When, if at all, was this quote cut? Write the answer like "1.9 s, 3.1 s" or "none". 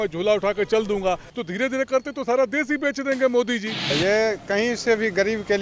1.3 s, 3.9 s